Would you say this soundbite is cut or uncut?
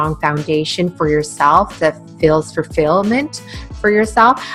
uncut